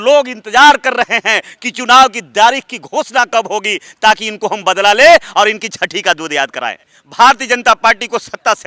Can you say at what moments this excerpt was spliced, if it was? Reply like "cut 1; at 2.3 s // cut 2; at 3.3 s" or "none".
cut 1; at 7.0 s